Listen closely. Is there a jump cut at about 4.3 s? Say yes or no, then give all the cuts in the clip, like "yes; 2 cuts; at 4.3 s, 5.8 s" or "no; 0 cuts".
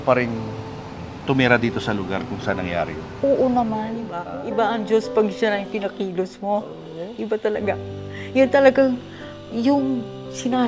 yes; 1 cut; at 4.3 s